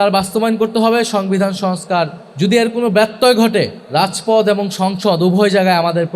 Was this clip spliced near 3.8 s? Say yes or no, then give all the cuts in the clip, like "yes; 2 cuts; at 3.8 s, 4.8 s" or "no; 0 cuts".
yes; 2 cuts; at 2.2 s, 3.8 s